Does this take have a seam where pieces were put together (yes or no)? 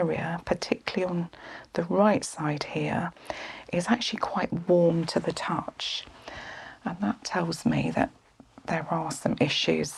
no